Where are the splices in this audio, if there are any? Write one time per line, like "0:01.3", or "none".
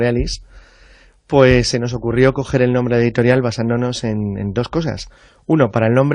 0:04.6